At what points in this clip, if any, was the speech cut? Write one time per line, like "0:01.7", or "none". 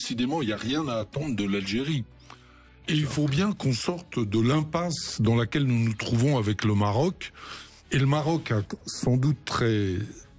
none